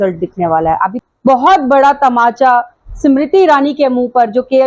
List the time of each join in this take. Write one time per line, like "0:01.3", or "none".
0:01.0